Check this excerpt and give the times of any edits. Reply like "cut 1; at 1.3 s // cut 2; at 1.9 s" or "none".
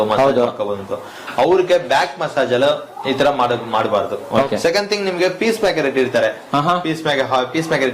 cut 1; at 4.5 s